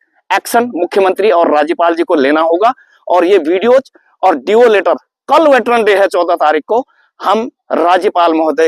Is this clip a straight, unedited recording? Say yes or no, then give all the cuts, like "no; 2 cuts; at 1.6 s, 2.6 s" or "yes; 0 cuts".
yes; 0 cuts